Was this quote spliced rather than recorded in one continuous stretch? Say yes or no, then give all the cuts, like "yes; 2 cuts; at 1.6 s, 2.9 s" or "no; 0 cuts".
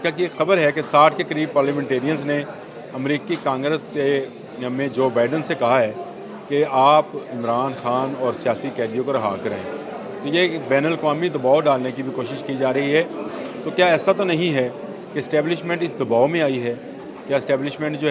no; 0 cuts